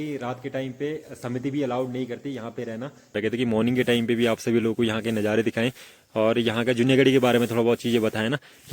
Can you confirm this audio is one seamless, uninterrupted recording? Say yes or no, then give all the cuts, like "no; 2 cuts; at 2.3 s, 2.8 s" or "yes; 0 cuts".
no; 1 cut; at 3.2 s